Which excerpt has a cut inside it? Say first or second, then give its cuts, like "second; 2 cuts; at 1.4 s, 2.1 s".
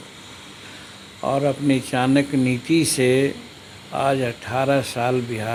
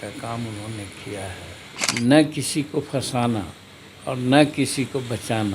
second; 1 cut; at 1.9 s